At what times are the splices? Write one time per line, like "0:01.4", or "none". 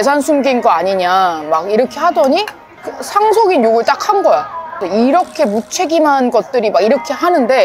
none